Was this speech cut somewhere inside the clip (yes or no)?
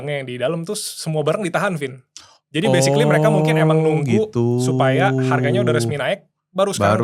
no